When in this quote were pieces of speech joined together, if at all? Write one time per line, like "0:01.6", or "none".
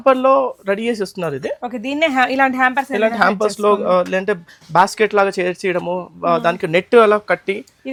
none